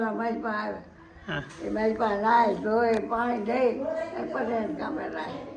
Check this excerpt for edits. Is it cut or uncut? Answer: uncut